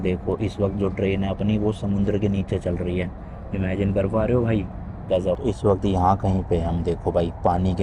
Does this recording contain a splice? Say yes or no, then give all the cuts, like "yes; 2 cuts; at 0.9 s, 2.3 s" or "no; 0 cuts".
yes; 1 cut; at 5.4 s